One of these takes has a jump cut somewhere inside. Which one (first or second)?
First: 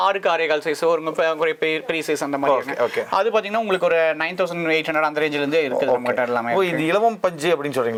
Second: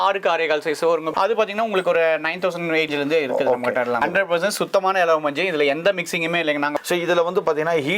second